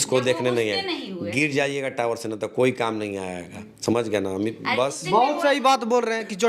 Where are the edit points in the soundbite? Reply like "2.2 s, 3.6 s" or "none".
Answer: none

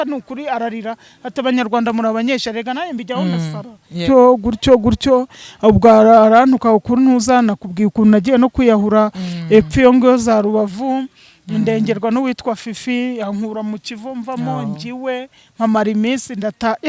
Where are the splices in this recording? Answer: 3.9 s

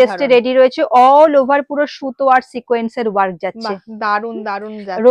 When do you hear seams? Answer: none

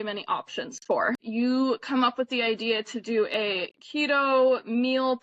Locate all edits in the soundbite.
1.2 s

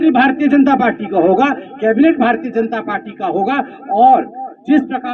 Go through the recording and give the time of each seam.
none

